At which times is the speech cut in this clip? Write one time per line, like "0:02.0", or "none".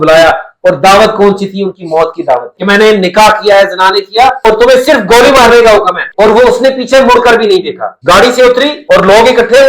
0:02.5
0:06.0